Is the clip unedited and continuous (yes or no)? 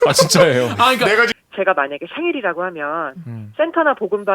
no